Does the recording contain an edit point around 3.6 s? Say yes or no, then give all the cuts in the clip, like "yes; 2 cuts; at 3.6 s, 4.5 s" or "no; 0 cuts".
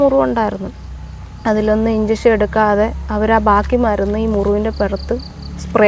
no; 0 cuts